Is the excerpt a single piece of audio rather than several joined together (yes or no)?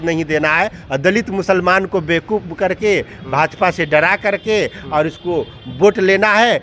yes